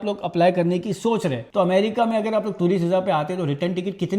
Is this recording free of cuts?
no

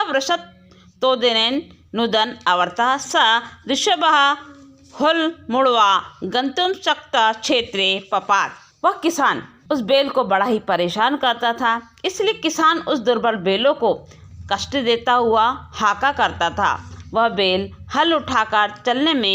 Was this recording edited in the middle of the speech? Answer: yes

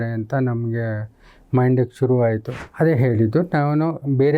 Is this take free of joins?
no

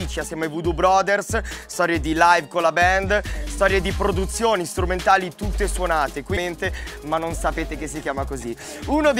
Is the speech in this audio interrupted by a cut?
no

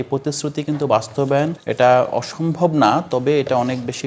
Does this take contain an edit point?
yes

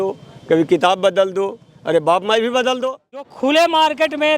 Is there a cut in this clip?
yes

